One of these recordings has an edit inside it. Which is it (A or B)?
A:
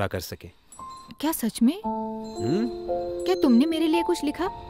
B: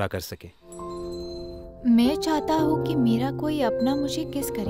B